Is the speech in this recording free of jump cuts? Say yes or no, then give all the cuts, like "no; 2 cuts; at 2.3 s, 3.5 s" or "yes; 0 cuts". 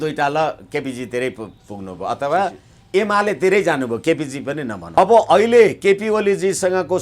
no; 1 cut; at 5.0 s